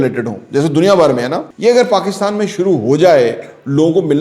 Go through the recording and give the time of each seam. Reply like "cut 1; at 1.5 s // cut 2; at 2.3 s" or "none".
cut 1; at 1.5 s

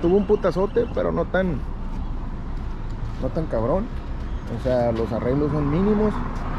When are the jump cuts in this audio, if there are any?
none

